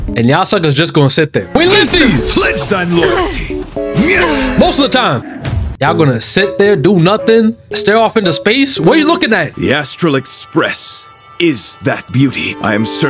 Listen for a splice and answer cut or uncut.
cut